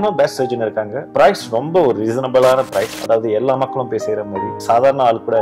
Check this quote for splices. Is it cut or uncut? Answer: cut